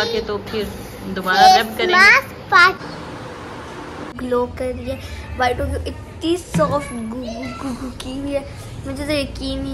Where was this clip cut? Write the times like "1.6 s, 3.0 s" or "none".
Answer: 2.8 s, 4.1 s